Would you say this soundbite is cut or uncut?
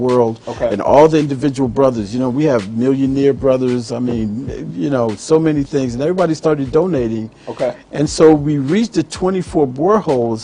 uncut